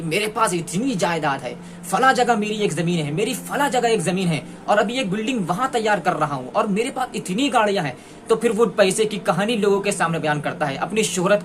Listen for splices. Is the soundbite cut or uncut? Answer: uncut